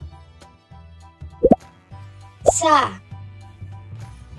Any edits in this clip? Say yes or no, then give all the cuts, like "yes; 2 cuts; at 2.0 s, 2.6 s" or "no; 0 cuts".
yes; 1 cut; at 3.5 s